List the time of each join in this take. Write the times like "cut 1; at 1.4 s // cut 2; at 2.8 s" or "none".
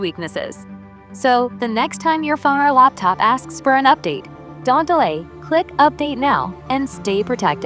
none